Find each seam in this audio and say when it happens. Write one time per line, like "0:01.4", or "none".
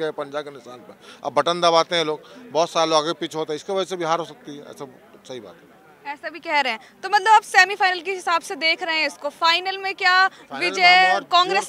none